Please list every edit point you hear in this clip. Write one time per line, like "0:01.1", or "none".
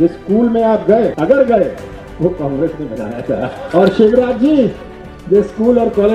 0:01.1
0:03.6